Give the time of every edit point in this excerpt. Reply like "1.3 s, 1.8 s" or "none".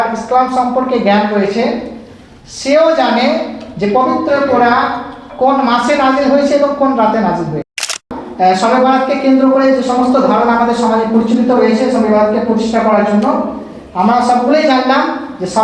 8.2 s